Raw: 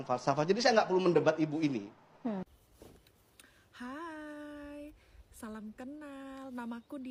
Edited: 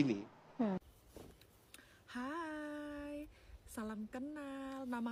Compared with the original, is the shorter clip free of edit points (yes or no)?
yes